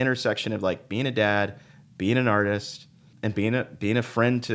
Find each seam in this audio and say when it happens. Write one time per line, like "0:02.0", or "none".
0:03.1